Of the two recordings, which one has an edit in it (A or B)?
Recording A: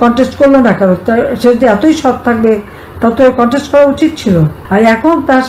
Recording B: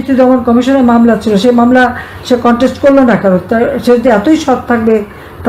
A